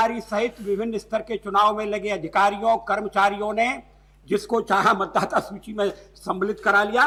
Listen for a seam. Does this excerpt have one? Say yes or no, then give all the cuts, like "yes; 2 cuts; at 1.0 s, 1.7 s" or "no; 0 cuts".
no; 0 cuts